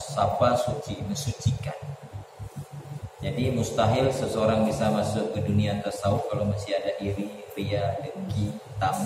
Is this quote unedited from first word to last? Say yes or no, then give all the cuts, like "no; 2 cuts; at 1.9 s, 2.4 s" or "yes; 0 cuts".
yes; 0 cuts